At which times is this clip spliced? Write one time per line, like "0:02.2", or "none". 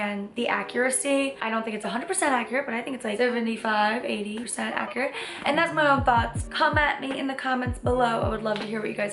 none